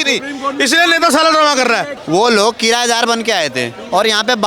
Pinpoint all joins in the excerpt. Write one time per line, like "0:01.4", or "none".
0:01.9